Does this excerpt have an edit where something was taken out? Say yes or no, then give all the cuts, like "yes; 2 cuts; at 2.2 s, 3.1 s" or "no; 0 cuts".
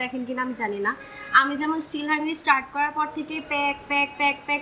no; 0 cuts